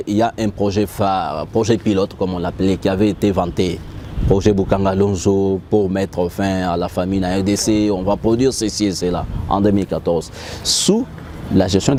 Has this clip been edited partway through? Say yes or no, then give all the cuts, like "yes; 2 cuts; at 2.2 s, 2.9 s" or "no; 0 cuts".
no; 0 cuts